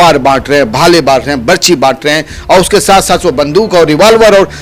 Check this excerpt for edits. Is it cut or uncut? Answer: uncut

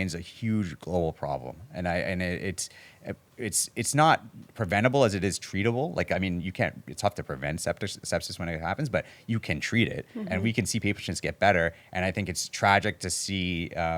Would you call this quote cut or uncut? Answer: uncut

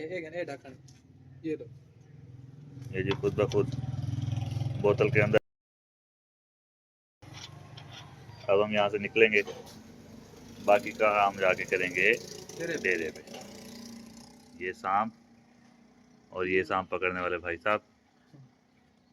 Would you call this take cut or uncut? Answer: uncut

